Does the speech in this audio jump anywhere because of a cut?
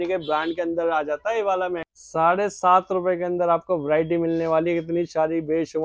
yes; 1 cut; at 1.8 s

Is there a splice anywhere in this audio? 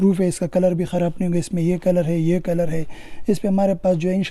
no; 0 cuts

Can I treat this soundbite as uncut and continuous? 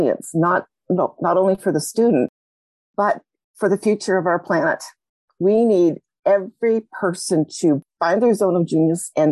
no; 1 cut; at 7.8 s

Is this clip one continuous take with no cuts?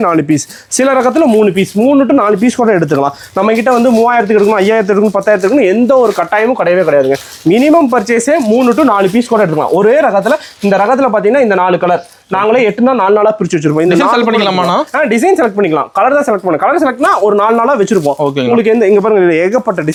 yes; 0 cuts

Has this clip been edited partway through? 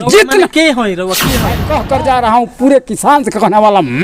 yes; 1 cut; at 1.7 s

